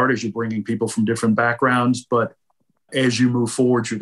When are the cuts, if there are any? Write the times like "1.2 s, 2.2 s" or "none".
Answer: none